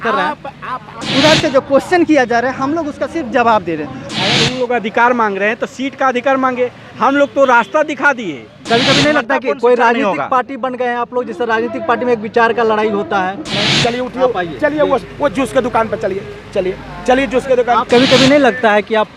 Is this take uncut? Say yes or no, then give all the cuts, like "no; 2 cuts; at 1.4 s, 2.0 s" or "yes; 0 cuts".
no; 5 cuts; at 1.0 s, 4.0 s, 8.6 s, 13.5 s, 17.9 s